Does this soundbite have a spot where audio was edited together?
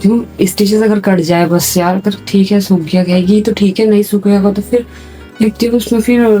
no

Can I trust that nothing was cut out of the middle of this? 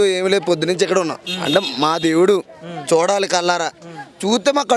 yes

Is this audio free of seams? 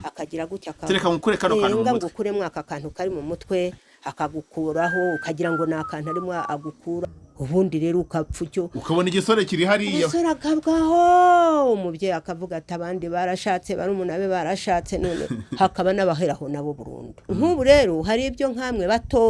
no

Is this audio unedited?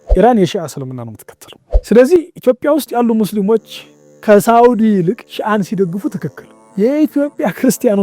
no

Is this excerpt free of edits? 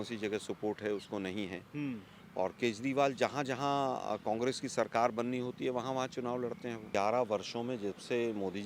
no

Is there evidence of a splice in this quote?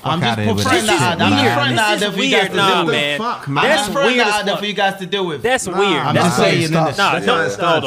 no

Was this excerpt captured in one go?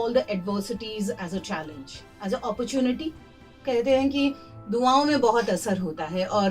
no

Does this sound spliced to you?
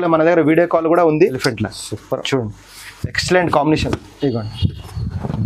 yes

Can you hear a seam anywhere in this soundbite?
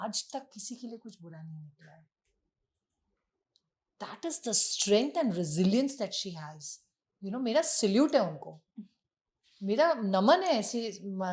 no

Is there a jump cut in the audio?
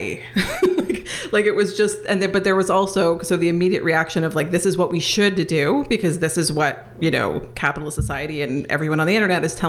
no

